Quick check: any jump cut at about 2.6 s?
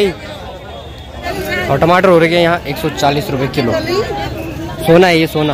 no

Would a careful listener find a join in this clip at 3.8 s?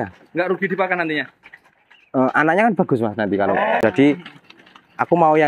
yes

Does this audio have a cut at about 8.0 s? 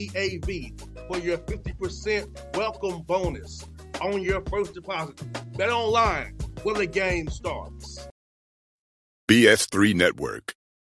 yes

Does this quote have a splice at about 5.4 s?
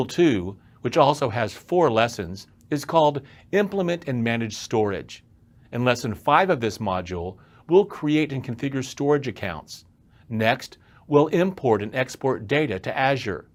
no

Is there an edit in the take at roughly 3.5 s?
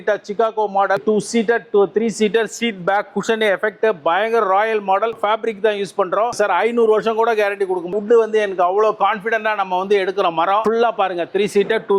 no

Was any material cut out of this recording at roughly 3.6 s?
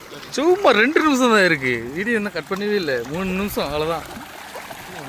no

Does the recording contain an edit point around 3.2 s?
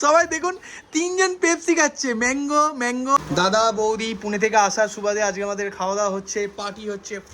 yes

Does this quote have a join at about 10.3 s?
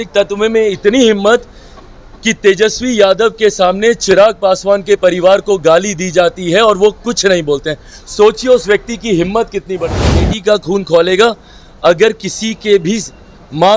yes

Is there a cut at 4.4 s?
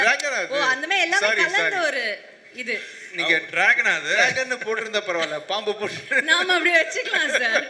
no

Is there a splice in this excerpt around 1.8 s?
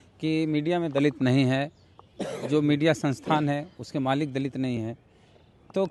no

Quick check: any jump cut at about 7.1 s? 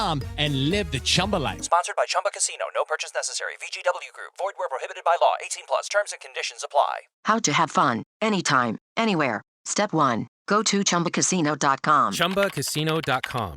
no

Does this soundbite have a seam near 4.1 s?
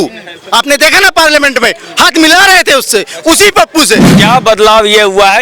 yes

